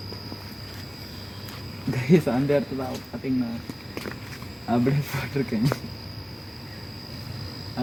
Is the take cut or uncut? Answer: uncut